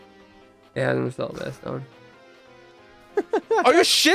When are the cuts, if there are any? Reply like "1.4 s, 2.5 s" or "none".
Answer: none